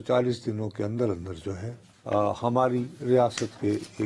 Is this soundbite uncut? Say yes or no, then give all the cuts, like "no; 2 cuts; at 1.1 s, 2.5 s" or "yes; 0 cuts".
yes; 0 cuts